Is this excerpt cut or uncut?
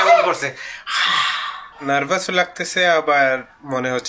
cut